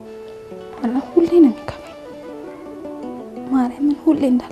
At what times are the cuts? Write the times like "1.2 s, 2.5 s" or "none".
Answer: 0.8 s, 1.7 s, 3.5 s